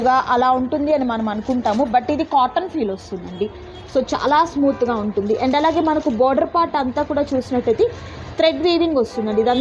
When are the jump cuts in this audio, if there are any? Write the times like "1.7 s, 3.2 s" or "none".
none